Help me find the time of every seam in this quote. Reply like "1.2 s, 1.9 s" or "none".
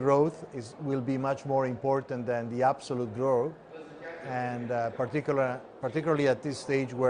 none